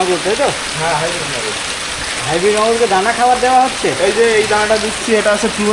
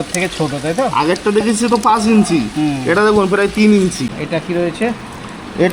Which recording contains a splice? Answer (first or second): second